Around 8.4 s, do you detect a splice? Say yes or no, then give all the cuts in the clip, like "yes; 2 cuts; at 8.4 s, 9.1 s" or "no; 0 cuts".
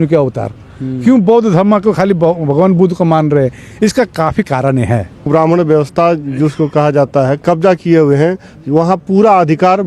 no; 1 cut; at 5.3 s